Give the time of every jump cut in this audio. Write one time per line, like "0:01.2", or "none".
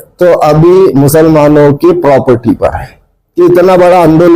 0:03.2

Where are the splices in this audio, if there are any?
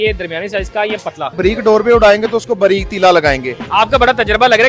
0:01.4
0:03.5

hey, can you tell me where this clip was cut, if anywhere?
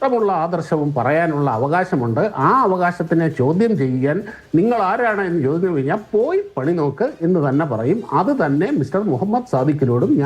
0:08.0

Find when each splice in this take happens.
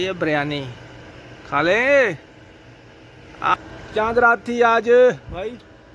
0:03.5

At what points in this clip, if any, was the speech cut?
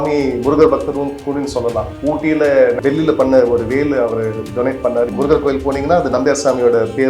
0:01.9
0:02.8
0:05.1

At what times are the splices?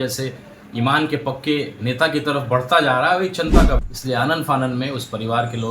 0:03.9

